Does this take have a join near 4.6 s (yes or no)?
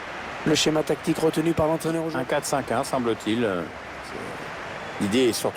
no